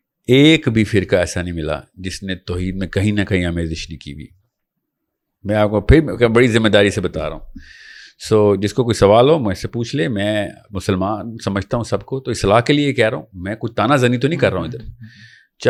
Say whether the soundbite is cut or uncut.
uncut